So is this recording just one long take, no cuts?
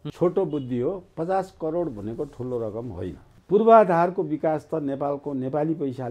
no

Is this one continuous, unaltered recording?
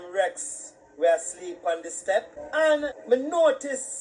no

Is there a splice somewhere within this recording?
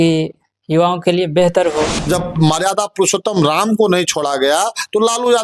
yes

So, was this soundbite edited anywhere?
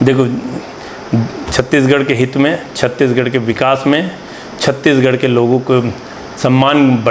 no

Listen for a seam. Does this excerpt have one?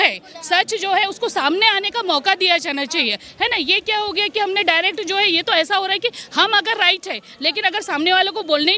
no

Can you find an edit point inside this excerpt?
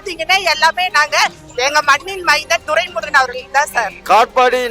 no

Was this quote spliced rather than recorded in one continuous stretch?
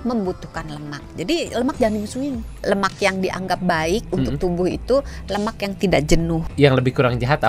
yes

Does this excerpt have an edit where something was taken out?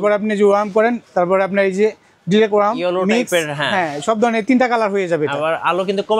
no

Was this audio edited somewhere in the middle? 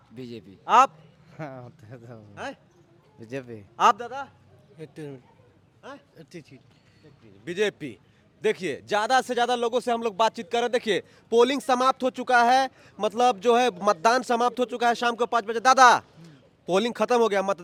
no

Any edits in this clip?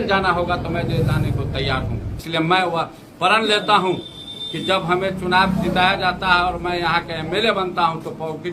yes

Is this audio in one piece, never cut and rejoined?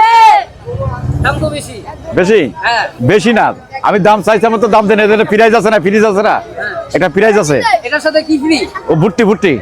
yes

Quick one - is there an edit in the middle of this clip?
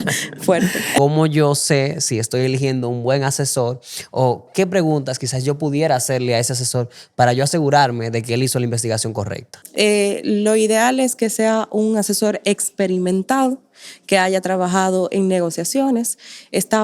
yes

